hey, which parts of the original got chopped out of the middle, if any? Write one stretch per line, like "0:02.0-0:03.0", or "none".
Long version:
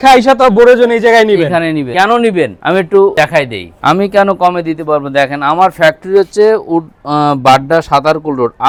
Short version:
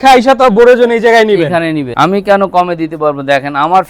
0:01.8-0:03.7